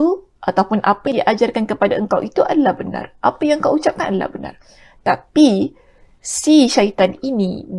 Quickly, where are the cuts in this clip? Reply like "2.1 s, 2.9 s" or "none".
1.1 s